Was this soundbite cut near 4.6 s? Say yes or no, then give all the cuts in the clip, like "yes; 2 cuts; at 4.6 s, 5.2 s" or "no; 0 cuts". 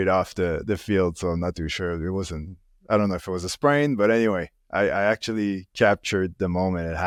no; 0 cuts